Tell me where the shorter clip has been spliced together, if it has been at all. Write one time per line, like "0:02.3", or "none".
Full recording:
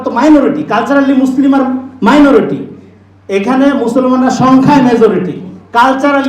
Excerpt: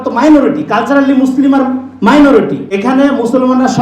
0:02.6

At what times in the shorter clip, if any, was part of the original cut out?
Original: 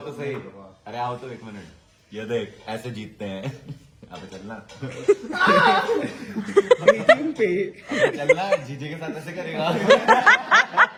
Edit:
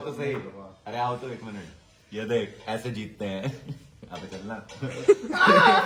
none

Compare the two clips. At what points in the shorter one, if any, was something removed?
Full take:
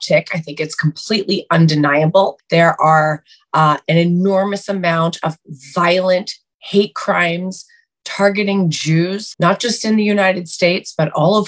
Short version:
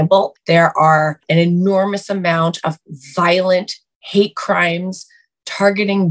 0:01.2

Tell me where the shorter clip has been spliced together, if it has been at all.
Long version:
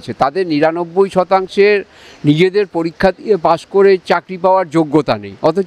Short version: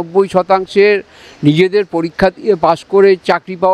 none

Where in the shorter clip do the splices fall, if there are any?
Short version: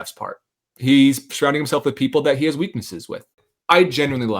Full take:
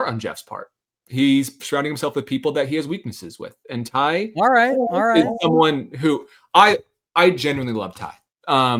0:03.5

